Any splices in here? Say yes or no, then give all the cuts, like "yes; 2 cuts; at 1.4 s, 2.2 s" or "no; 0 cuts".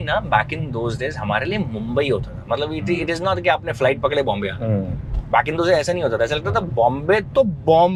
no; 0 cuts